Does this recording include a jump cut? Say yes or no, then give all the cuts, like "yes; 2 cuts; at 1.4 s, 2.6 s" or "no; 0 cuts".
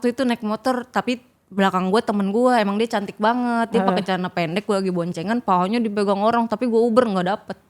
no; 0 cuts